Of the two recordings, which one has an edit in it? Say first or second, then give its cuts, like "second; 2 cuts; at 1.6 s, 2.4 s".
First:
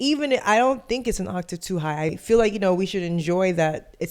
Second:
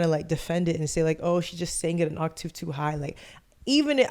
first; 1 cut; at 2.1 s